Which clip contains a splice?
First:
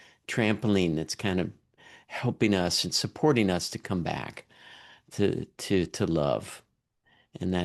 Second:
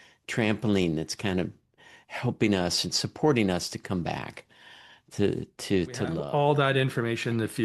second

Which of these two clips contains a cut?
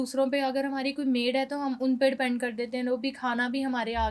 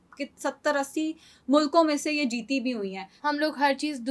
second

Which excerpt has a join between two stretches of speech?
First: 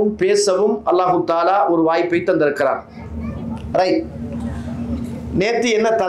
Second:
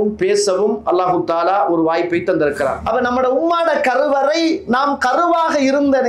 second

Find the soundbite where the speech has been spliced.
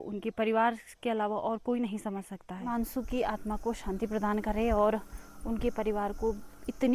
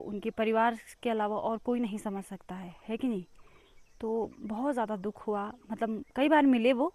first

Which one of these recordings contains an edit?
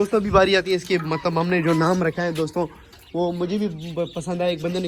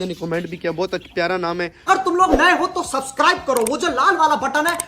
second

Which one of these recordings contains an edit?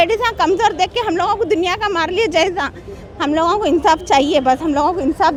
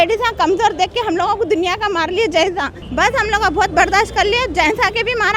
second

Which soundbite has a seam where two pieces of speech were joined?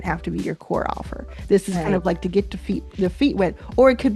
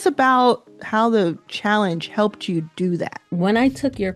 second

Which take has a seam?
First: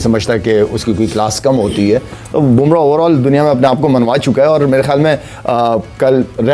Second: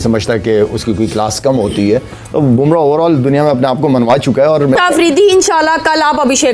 second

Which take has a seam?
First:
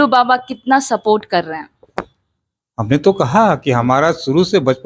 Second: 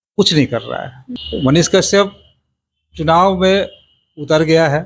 second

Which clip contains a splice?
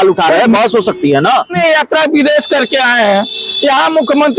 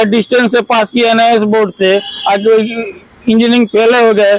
first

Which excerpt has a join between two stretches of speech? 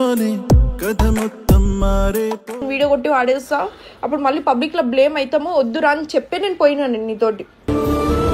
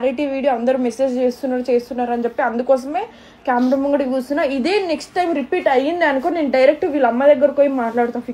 first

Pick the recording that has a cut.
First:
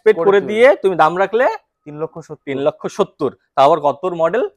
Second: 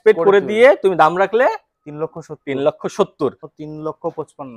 second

